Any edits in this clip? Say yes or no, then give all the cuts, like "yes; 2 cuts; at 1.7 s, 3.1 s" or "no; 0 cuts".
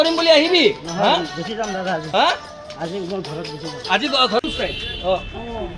yes; 1 cut; at 4.4 s